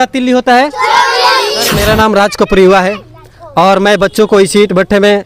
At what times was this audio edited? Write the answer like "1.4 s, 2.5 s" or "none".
1.8 s